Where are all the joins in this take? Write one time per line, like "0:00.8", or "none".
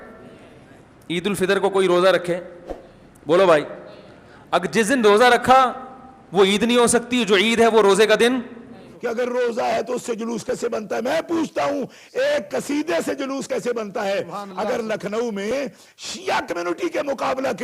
0:08.9